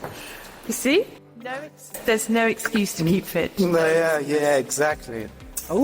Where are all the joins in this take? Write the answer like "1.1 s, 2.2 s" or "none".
none